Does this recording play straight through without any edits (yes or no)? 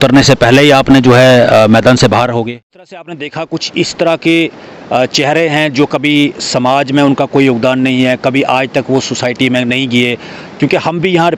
no